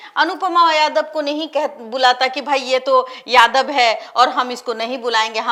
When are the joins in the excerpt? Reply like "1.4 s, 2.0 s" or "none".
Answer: none